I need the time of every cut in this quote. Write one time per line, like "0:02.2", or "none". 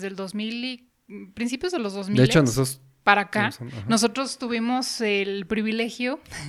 none